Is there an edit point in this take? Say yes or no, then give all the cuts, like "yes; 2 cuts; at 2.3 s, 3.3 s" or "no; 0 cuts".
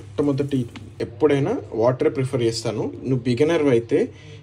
yes; 1 cut; at 1.0 s